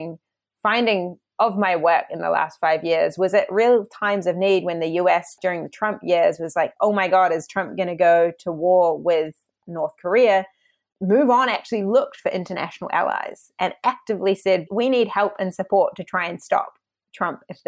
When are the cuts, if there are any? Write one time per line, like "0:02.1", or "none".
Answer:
0:01.2
0:05.4
0:14.7